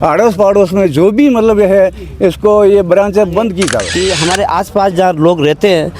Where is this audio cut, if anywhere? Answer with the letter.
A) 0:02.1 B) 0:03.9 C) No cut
B